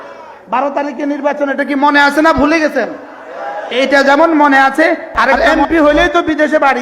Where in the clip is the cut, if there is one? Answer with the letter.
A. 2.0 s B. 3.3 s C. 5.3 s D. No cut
C